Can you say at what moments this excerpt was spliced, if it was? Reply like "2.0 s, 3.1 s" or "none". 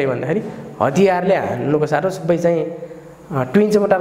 none